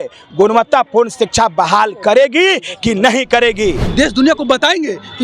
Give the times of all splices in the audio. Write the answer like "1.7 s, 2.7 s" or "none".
3.8 s

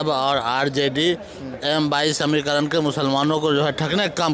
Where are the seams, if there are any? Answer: none

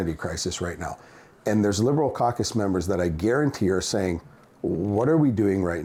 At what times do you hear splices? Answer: none

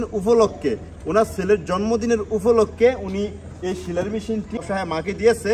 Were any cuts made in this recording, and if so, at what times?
4.6 s

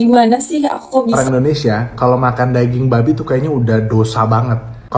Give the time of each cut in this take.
1.1 s

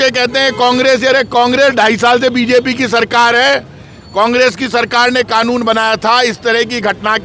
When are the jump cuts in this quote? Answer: none

